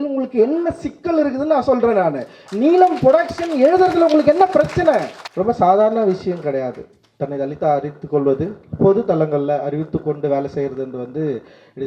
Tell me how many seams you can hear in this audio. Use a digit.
1